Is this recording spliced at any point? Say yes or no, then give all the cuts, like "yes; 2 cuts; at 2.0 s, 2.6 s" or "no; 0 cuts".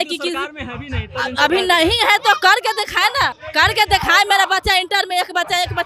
yes; 1 cut; at 3.4 s